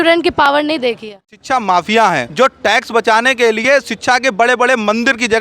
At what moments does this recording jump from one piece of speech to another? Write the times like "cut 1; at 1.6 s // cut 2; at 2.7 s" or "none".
cut 1; at 1.3 s // cut 2; at 2.3 s